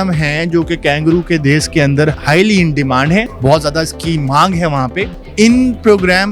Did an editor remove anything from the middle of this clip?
yes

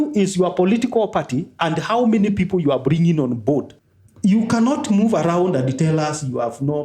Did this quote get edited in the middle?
yes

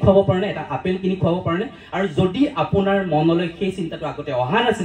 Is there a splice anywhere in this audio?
no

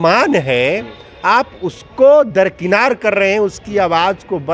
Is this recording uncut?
yes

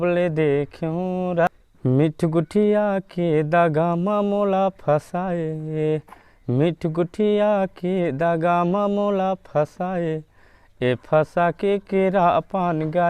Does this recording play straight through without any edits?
no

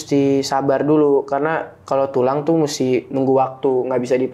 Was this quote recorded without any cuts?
yes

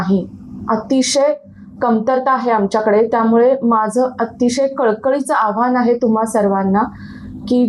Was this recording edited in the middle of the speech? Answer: no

